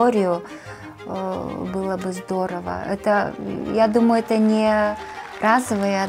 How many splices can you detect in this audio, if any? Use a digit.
0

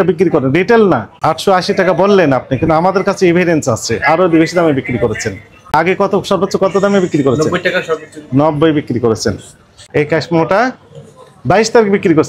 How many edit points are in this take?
3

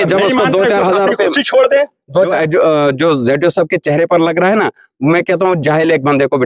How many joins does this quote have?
1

